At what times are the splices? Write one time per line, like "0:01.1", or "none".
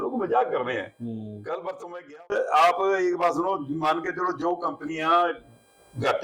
0:02.3